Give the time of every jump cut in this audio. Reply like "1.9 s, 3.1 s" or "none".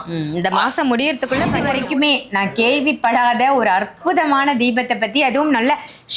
1.6 s